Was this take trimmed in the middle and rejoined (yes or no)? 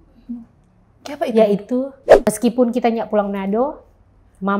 yes